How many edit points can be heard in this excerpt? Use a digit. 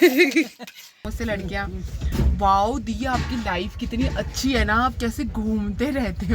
1